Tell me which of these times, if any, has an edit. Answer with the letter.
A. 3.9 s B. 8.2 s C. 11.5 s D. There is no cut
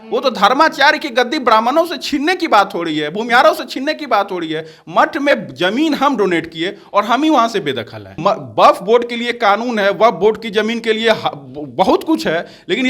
B